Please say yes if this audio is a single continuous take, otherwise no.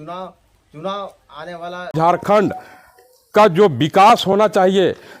no